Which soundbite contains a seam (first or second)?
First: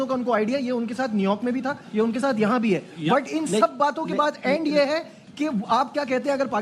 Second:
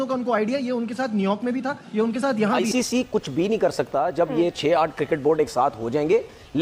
second